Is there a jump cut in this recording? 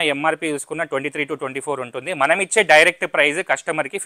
no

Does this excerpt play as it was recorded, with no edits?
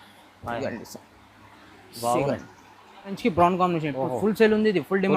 no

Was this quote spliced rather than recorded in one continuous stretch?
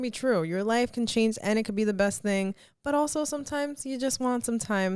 no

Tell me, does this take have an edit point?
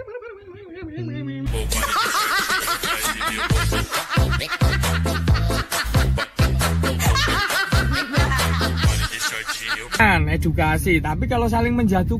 yes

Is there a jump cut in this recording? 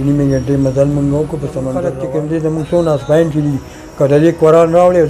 yes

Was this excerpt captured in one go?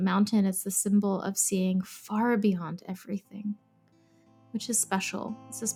yes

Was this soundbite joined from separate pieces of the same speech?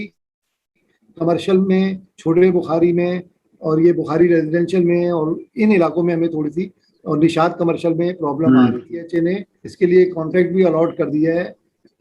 yes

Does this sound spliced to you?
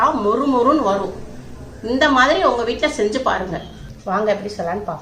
yes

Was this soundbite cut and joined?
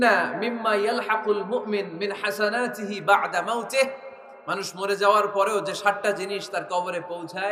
no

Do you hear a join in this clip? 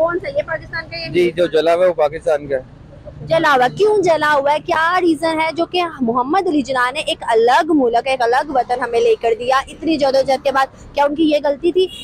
no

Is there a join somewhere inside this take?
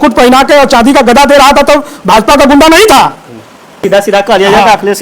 yes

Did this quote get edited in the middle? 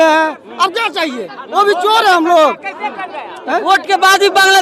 no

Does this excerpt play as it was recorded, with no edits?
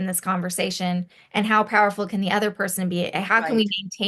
yes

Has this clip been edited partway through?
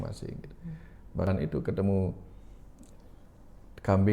yes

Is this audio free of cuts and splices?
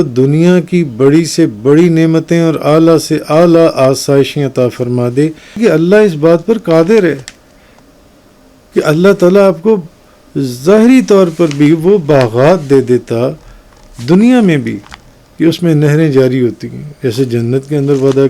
no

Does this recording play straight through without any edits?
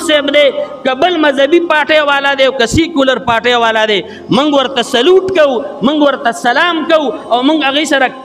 yes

